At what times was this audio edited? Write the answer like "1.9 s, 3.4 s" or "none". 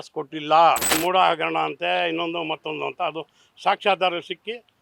0.9 s